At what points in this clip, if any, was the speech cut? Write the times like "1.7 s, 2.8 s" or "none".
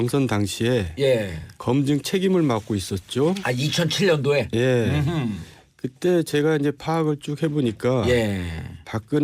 none